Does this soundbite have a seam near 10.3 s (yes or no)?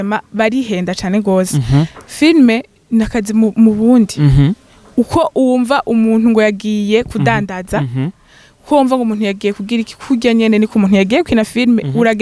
no